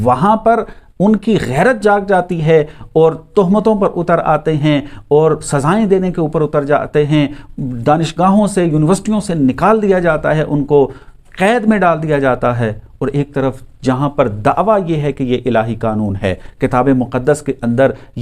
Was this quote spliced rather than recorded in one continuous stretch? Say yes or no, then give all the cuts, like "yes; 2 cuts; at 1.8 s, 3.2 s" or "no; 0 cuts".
no; 0 cuts